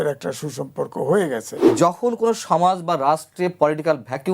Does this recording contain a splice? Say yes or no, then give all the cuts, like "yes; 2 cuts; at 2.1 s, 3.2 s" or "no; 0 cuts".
yes; 1 cut; at 1.6 s